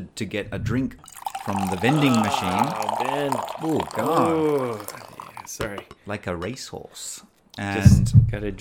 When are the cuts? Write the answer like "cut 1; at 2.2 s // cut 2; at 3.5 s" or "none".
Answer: cut 1; at 1.0 s